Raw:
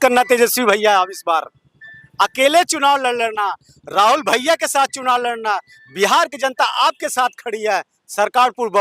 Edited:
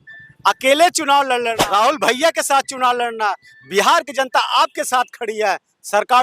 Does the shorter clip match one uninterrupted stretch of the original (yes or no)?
no